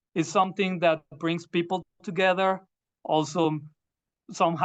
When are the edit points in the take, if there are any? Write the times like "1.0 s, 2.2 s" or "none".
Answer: 2.7 s